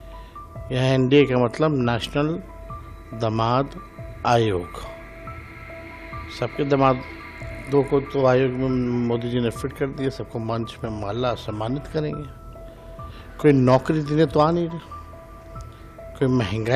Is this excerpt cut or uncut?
uncut